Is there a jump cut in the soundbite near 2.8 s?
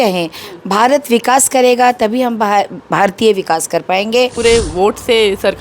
no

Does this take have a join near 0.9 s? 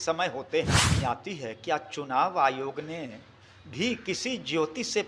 yes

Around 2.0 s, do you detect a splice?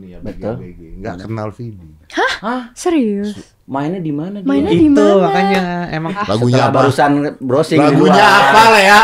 no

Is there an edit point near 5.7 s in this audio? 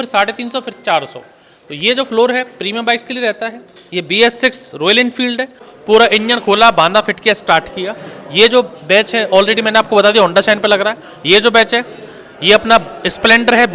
yes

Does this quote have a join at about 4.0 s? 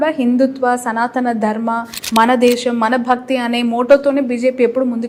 no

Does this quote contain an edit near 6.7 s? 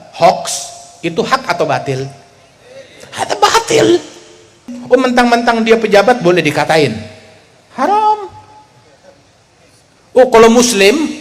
no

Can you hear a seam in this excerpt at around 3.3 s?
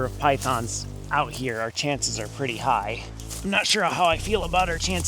yes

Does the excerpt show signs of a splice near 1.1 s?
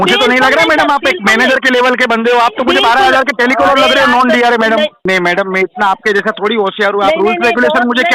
no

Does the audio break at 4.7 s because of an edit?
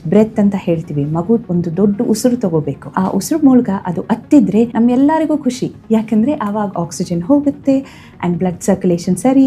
yes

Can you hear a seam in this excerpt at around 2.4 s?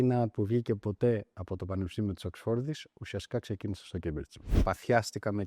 no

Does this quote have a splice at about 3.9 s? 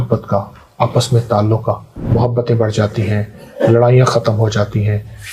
no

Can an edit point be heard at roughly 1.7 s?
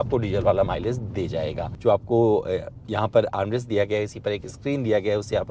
yes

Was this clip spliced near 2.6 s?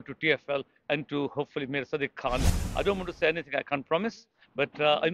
yes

